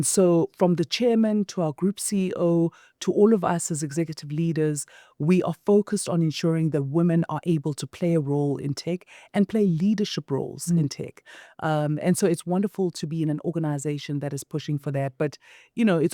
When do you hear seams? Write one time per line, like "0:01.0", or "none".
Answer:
none